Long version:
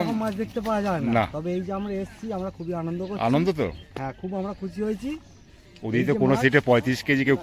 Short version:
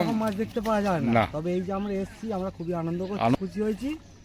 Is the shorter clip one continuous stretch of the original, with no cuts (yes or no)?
no